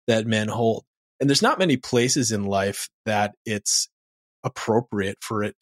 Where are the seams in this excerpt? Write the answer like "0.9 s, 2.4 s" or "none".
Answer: none